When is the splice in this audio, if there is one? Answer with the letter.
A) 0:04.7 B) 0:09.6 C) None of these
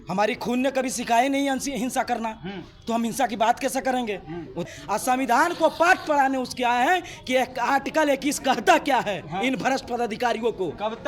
A